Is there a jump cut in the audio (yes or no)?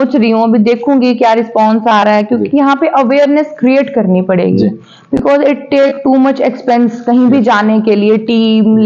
no